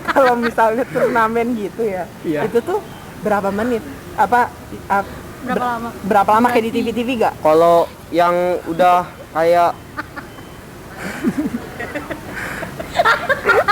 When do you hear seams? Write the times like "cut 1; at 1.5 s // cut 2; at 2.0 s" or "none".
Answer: none